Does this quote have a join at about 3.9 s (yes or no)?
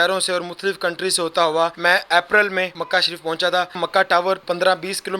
yes